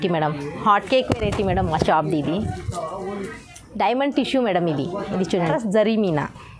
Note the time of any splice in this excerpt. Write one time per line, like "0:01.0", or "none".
0:05.5